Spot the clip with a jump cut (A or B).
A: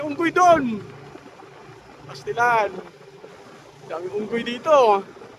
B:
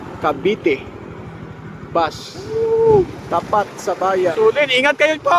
B